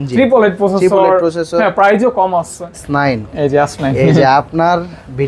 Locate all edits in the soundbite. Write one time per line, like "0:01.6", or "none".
0:02.8